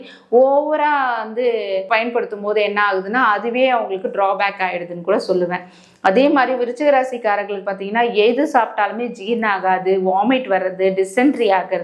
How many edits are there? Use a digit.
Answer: 0